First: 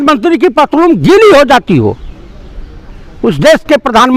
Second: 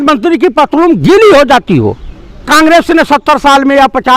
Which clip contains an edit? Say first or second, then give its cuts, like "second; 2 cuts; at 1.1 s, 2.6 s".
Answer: second; 1 cut; at 2.4 s